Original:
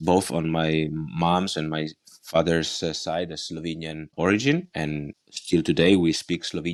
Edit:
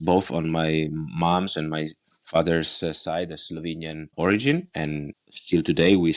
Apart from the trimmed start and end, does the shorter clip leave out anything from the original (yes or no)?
no